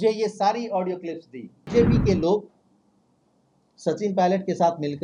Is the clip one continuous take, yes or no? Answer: no